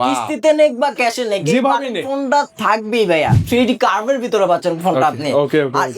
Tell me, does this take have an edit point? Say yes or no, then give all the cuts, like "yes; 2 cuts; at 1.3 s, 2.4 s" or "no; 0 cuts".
yes; 1 cut; at 3.4 s